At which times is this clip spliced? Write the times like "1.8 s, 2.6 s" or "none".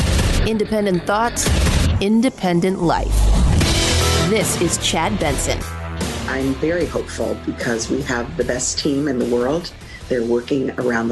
6.2 s